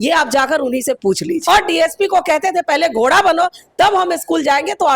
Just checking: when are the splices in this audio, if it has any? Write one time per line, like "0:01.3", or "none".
0:01.4